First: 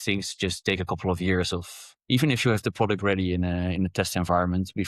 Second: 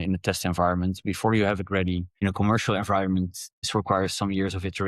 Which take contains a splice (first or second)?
second